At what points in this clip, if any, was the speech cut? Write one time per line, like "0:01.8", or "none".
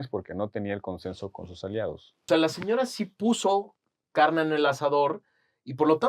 0:02.1